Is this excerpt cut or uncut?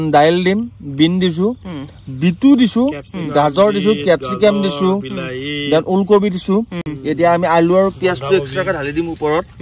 uncut